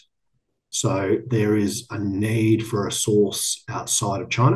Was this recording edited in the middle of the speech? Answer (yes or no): no